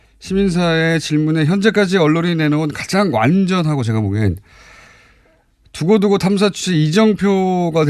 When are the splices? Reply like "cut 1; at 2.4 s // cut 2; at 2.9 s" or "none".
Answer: cut 1; at 4.5 s